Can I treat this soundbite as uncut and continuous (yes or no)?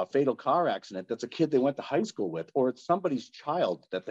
yes